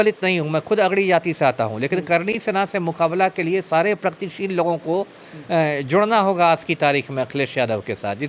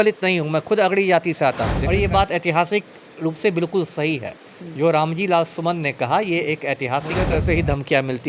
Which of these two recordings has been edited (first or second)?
second